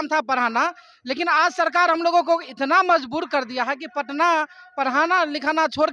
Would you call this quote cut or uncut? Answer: uncut